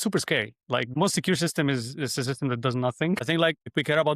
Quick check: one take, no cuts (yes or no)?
no